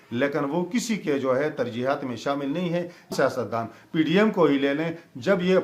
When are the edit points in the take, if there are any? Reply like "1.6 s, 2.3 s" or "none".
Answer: 3.1 s